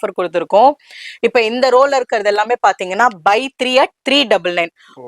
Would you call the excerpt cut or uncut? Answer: uncut